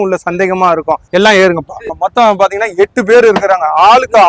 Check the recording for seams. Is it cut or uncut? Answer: cut